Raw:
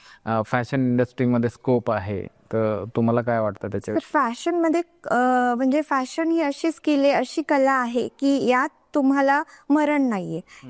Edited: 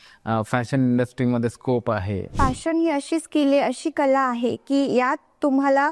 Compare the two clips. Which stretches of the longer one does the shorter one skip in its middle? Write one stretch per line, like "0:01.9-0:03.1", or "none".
0:02.3-0:05.9